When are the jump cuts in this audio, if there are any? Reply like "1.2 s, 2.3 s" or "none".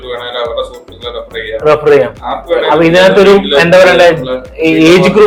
none